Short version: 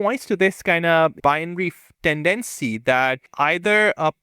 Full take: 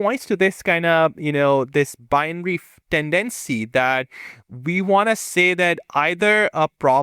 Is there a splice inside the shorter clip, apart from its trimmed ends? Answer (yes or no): yes